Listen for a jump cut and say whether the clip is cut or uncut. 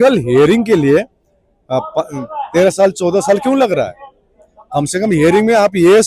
uncut